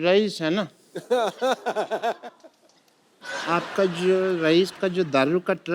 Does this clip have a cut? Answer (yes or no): yes